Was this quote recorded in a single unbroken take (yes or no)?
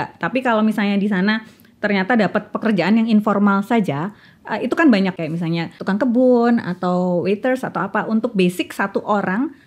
no